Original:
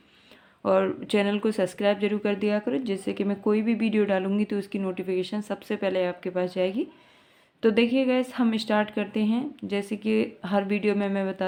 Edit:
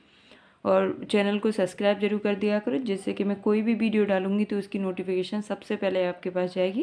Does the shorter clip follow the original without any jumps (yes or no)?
yes